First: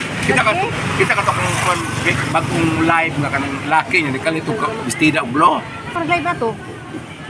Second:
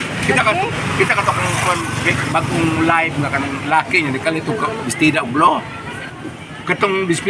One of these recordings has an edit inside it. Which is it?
second; 1 cut; at 5.9 s

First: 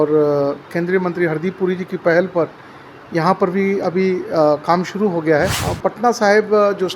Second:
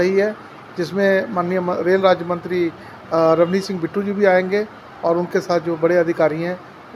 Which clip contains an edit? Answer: first; 1 cut; at 5.6 s

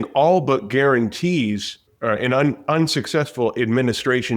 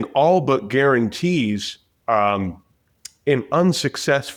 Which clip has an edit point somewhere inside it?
first; 1 cut; at 1.8 s

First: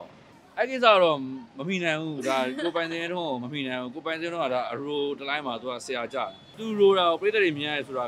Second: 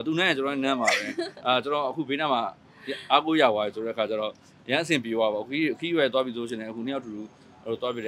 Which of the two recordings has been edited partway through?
first; 1 cut; at 6.5 s

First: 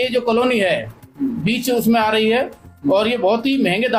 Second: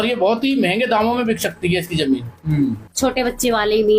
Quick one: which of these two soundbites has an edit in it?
second; 1 cut; at 2.8 s

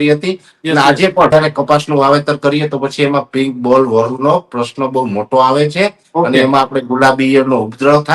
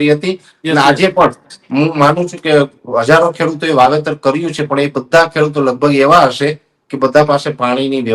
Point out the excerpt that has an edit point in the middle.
first; 1 cut; at 1.3 s

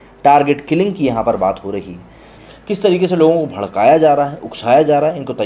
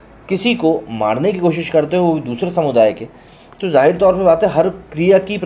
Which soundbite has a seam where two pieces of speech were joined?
first; 1 cut; at 2.3 s

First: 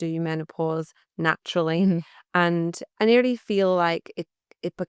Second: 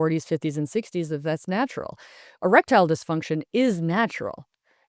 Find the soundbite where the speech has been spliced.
first; 1 cut; at 2.8 s

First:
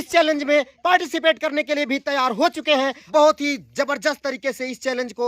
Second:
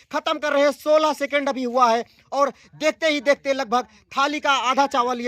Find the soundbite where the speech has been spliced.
first; 1 cut; at 3.0 s

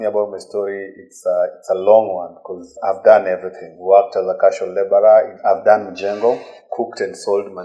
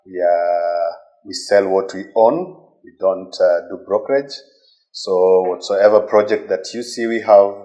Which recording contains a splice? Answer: first; 4 cuts; at 2.8 s, 3.8 s, 5.3 s, 6.6 s

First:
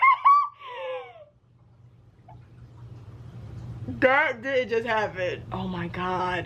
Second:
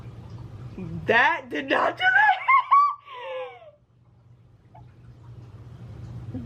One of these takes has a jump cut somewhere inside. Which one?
first; 1 cut; at 5.4 s

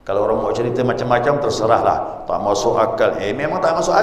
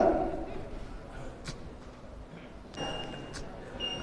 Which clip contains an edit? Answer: second; 1 cut; at 2.6 s

